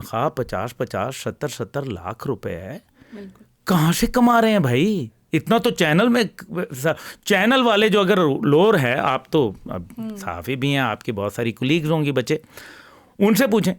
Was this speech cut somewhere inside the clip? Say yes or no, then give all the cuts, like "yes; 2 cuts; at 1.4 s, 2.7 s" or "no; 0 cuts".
no; 0 cuts